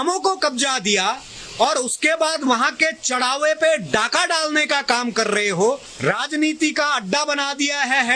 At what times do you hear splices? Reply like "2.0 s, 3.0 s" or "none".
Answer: 5.9 s